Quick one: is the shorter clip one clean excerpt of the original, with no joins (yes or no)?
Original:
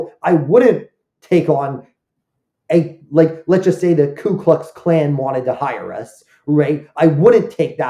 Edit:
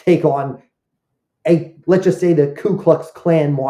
no